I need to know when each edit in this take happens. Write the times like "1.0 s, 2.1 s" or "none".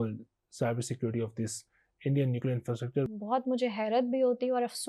3.1 s